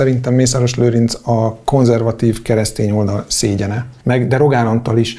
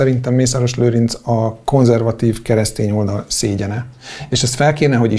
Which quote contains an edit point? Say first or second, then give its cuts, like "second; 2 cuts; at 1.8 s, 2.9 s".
first; 1 cut; at 3.9 s